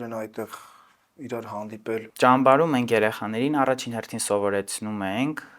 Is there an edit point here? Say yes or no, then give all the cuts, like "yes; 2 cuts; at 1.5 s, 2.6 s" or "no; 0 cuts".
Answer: yes; 1 cut; at 2.1 s